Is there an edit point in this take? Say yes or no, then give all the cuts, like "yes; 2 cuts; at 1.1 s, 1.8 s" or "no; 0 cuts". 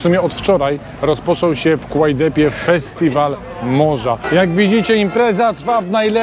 yes; 1 cut; at 4.2 s